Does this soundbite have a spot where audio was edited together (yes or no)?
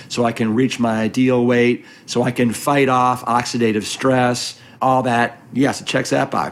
yes